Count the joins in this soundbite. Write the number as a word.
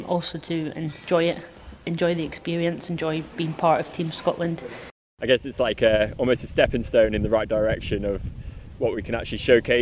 one